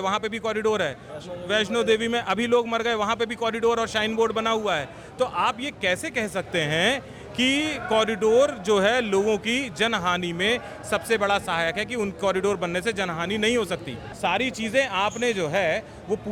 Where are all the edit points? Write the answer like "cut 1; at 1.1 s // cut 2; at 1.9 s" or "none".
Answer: cut 1; at 14.0 s